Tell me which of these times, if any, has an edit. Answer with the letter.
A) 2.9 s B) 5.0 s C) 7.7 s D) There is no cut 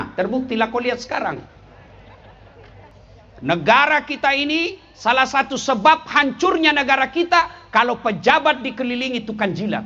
A